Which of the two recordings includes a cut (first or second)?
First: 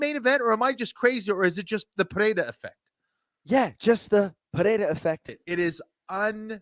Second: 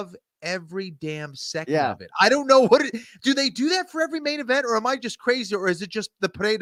first